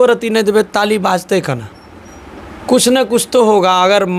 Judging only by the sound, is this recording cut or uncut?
uncut